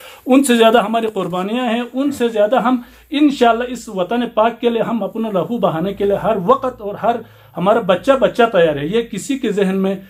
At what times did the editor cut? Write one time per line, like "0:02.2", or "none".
none